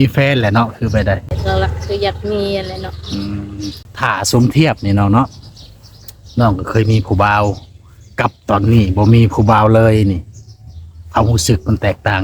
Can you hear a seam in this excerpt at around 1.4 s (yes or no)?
yes